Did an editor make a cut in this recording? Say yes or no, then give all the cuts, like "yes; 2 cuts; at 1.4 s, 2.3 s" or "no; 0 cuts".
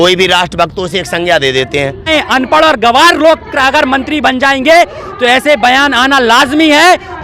yes; 1 cut; at 2.1 s